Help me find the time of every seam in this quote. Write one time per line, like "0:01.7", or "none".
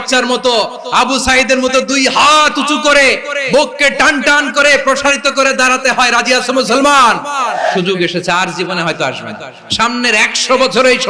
0:07.7